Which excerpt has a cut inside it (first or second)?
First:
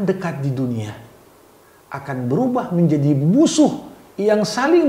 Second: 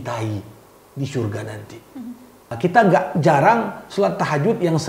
second